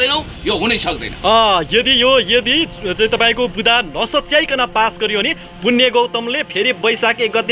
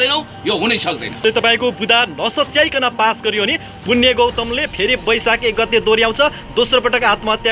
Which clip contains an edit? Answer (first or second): second